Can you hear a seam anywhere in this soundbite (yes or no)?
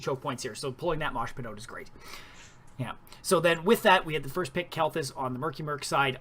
yes